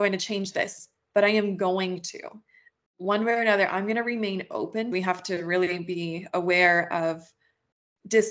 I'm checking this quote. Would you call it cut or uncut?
cut